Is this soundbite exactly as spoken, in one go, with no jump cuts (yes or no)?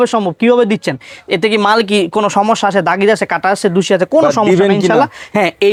yes